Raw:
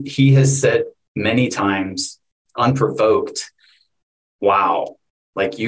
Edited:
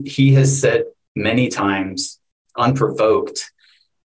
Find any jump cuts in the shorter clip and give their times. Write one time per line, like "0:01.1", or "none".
none